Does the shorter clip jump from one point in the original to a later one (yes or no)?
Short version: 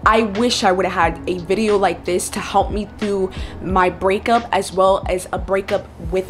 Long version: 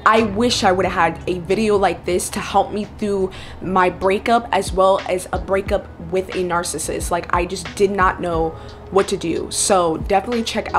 no